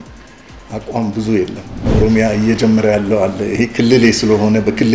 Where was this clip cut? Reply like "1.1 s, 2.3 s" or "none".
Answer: 1.9 s